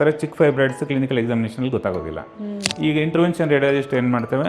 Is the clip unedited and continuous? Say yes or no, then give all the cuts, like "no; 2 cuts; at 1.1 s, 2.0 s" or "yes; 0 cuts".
no; 1 cut; at 2.6 s